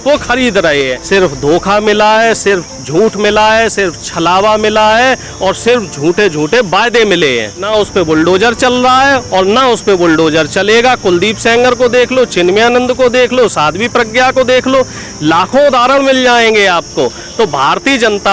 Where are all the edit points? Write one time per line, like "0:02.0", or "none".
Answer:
0:01.0
0:07.7